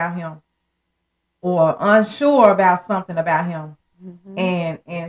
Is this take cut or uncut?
uncut